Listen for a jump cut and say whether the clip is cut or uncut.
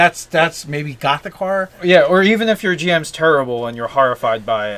uncut